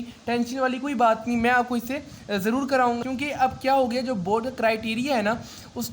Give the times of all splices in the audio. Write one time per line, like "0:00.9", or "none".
0:03.0